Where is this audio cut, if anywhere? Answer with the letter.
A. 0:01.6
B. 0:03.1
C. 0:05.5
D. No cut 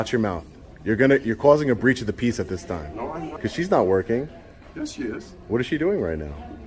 B